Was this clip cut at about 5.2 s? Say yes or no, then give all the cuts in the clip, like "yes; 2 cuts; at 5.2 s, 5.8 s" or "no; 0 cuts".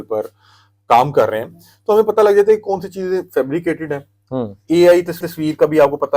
no; 0 cuts